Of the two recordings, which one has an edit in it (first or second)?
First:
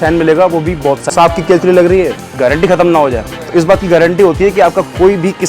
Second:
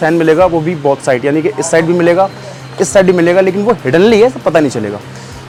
first